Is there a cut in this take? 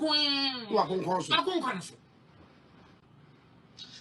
no; 0 cuts

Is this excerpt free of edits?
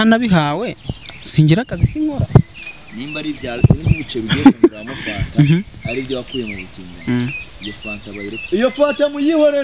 yes; 0 cuts

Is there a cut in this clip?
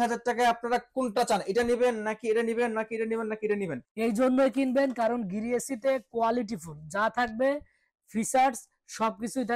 yes; 1 cut; at 3.8 s

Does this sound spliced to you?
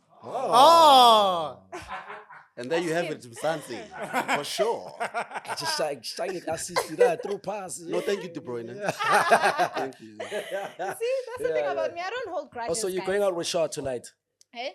no; 0 cuts

